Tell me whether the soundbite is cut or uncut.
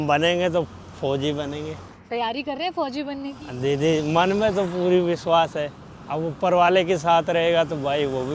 uncut